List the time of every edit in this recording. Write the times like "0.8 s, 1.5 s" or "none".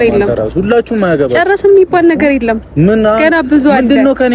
none

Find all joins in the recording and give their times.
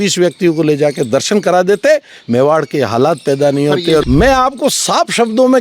4.0 s

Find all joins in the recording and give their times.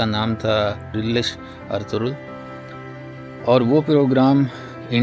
0.9 s

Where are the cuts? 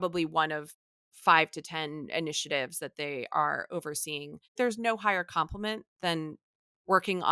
4.5 s

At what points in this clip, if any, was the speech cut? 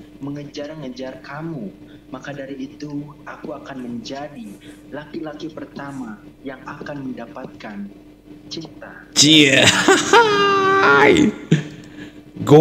none

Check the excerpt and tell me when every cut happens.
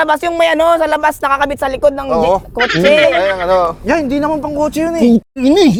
none

